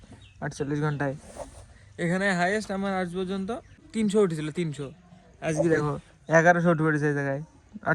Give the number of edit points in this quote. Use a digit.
1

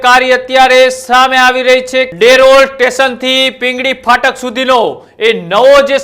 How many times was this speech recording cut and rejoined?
1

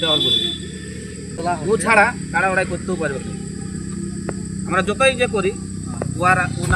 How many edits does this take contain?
1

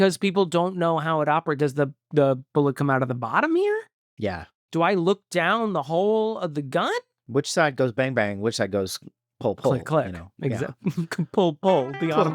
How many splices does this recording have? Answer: 1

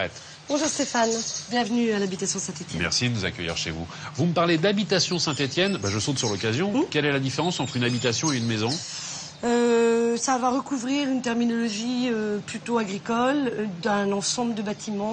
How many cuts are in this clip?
1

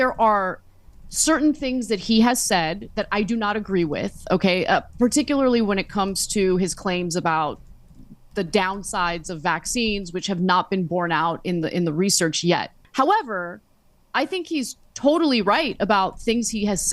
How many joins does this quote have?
1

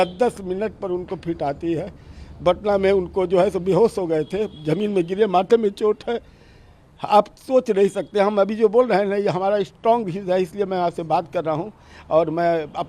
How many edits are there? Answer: 0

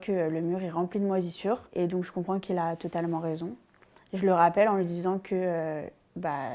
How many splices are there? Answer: 0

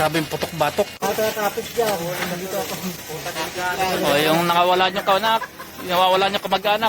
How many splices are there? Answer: 1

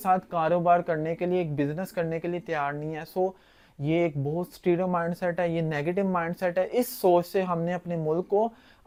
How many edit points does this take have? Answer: 0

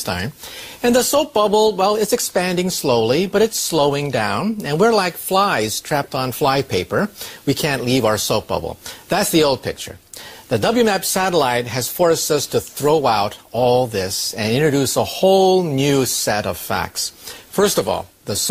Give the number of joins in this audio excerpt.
0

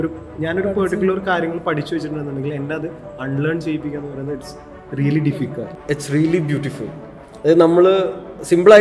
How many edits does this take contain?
1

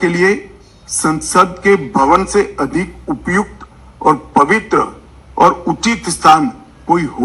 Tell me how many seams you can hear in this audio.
0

